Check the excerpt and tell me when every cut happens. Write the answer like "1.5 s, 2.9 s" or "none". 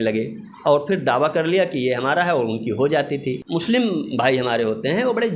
3.4 s